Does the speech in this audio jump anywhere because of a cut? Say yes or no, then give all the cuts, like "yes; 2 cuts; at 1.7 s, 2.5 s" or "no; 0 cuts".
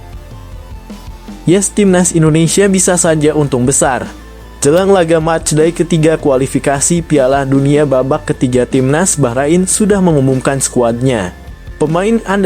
yes; 1 cut; at 1.4 s